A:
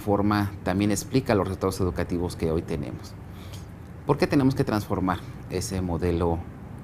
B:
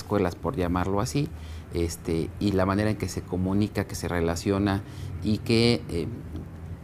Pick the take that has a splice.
B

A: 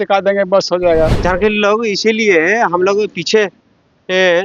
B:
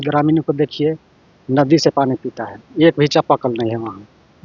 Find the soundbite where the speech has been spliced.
A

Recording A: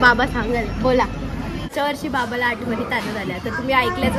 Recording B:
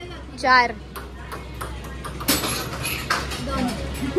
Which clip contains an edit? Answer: A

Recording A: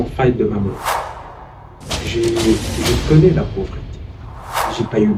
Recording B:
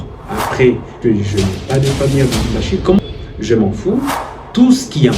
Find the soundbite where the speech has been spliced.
B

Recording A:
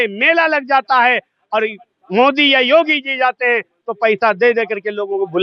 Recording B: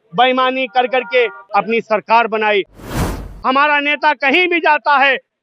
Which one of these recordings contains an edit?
B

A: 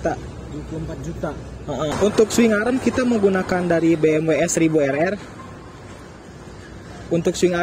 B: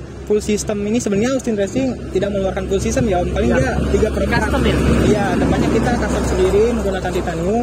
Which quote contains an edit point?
A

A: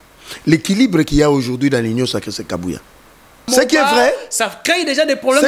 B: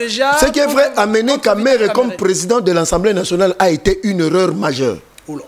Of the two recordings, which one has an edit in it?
A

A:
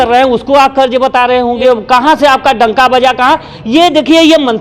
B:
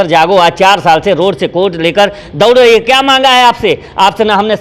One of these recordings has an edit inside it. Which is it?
A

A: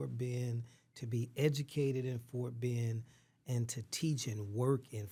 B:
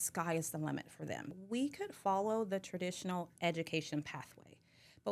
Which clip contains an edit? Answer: B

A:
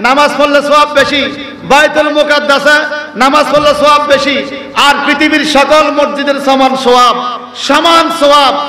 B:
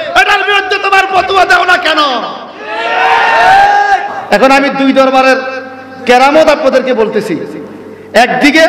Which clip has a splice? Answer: B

